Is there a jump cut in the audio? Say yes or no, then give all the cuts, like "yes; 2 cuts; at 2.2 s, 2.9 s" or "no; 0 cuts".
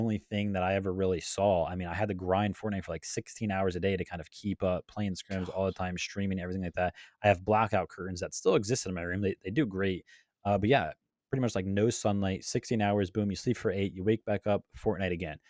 no; 0 cuts